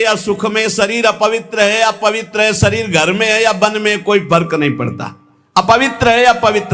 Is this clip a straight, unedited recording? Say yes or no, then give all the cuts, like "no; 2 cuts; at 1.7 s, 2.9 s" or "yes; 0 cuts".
yes; 0 cuts